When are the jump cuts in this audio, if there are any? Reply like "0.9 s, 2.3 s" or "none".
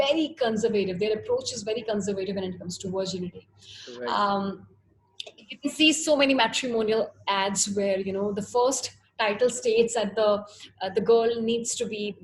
none